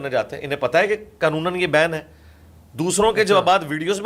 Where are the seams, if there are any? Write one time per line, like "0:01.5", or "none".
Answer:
none